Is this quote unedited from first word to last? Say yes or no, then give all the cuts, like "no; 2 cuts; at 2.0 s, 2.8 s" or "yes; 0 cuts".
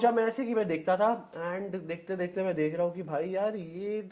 yes; 0 cuts